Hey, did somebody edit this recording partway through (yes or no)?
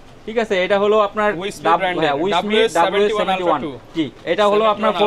no